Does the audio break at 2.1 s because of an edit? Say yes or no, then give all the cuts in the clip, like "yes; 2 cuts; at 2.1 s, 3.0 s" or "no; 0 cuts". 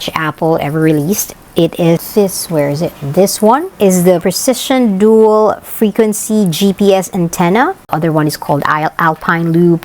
yes; 2 cuts; at 2.1 s, 7.8 s